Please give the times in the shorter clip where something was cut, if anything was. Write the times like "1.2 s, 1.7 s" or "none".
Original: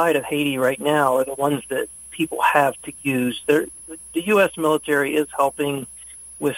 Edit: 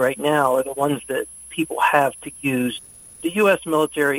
2.8 s